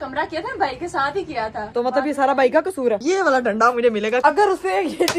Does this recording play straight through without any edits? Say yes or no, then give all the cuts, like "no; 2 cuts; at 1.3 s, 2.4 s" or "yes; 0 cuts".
no; 3 cuts; at 1.6 s, 3.0 s, 4.2 s